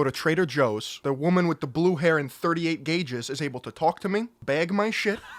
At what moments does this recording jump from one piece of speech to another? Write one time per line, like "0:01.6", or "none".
0:00.9
0:04.3